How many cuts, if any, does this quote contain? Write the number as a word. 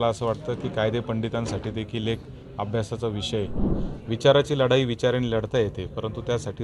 one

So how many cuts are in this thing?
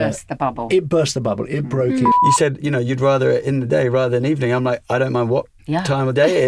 one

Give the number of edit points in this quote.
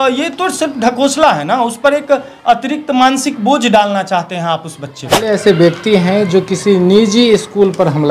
one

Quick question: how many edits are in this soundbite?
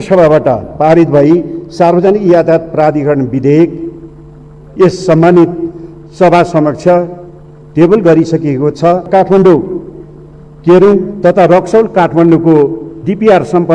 one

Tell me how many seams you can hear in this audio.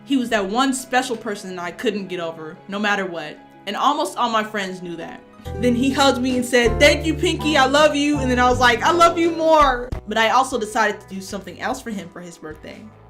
two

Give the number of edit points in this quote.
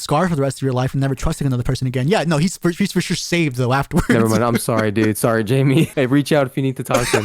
one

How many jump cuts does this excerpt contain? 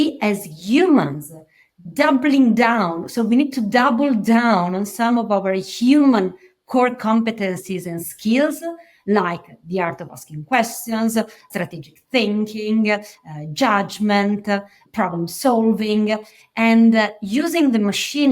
two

